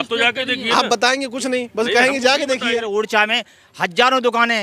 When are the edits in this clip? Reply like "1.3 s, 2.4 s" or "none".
2.8 s